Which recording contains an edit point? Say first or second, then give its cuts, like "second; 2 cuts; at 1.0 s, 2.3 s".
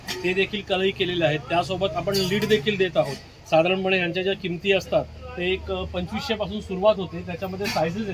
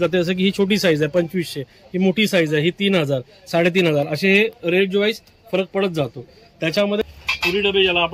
second; 1 cut; at 7.0 s